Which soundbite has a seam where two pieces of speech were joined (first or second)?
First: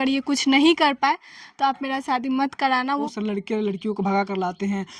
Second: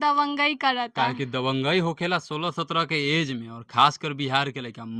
first